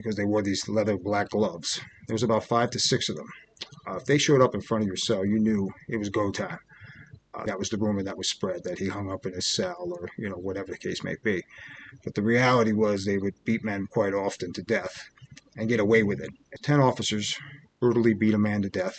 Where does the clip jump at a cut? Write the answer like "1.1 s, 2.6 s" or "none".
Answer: 7.4 s, 16.5 s